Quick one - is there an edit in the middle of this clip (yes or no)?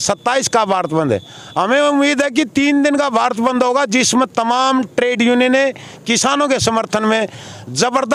no